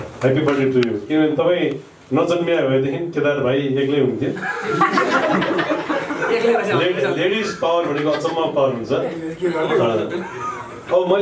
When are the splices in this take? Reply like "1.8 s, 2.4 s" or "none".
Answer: none